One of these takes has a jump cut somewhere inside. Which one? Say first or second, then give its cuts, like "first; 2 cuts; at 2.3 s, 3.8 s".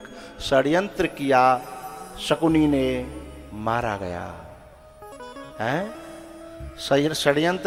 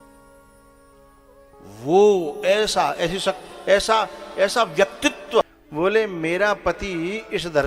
second; 1 cut; at 5.4 s